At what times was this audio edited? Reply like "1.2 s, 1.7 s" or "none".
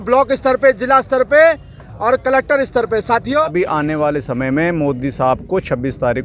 3.5 s